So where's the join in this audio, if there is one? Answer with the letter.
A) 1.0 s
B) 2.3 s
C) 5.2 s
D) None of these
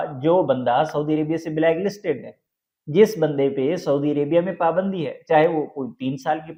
D